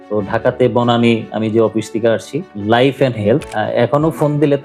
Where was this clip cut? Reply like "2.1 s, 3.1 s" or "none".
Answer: 3.4 s